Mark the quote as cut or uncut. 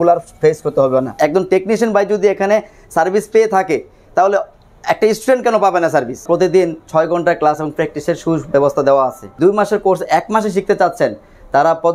cut